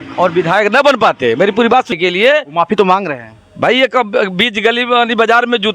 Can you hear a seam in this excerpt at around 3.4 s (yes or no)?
no